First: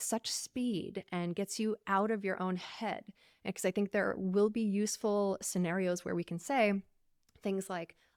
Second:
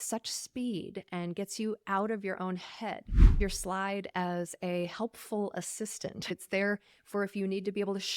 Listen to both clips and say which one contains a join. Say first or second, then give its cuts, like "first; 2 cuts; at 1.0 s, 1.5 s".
second; 2 cuts; at 3.4 s, 6.3 s